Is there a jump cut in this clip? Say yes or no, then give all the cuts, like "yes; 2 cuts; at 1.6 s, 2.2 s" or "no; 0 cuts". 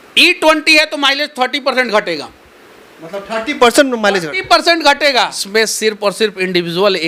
yes; 1 cut; at 5.4 s